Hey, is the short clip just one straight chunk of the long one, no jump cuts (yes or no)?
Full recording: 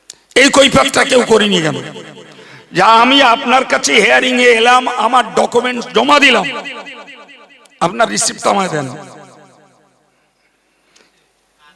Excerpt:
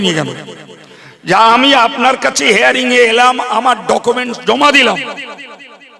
yes